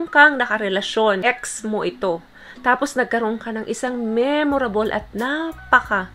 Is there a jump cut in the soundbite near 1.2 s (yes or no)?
yes